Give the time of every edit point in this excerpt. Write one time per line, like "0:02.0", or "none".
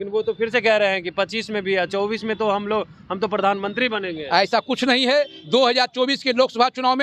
none